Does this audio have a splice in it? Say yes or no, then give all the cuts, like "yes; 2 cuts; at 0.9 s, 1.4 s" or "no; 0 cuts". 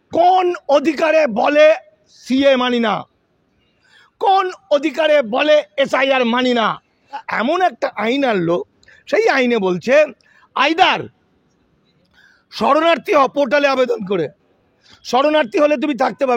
yes; 1 cut; at 7.2 s